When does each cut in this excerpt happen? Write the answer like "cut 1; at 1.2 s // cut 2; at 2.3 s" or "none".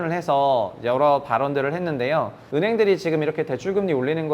cut 1; at 2.4 s